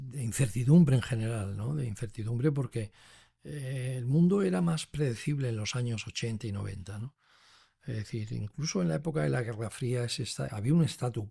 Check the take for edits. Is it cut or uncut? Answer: uncut